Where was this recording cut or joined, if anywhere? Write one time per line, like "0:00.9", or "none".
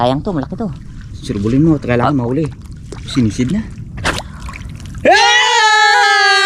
0:04.0